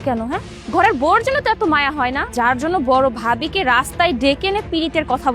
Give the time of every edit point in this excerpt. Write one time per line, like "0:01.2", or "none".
0:02.2